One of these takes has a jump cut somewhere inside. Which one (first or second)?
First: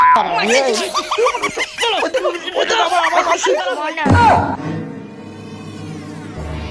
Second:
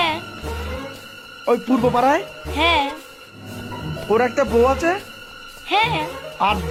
first